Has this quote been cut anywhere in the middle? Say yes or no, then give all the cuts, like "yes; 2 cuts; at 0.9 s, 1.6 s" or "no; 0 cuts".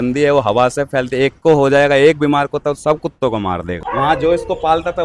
yes; 1 cut; at 3.8 s